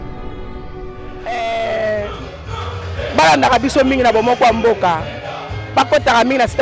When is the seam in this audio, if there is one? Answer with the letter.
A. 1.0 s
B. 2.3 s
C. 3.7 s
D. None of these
A